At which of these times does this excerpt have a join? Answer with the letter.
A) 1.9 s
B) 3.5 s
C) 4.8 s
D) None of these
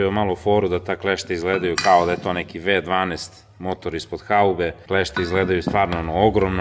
D